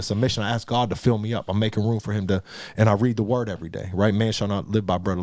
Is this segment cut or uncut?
uncut